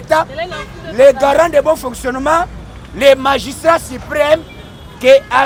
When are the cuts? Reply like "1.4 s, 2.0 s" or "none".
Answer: none